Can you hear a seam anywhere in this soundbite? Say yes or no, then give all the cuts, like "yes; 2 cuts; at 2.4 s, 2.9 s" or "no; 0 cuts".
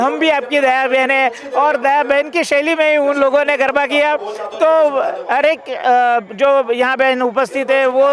no; 0 cuts